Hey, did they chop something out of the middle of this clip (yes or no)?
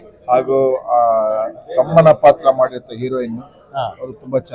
no